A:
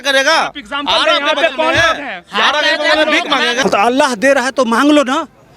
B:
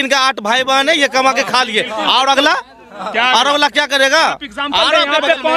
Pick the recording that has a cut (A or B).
A